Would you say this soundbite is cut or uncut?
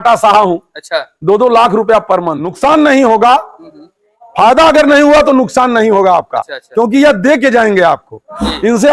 cut